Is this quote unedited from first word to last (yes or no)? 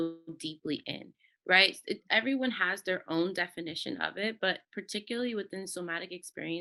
yes